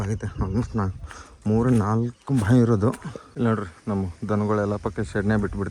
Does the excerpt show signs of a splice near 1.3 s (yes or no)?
no